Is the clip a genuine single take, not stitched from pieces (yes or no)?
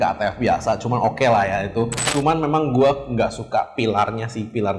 no